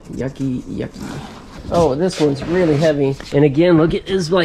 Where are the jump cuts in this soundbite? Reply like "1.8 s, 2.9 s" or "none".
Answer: 1.5 s

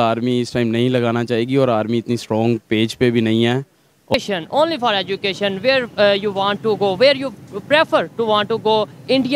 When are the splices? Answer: 4.1 s

